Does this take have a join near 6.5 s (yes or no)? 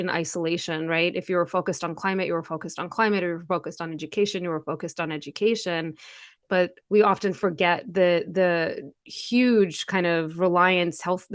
yes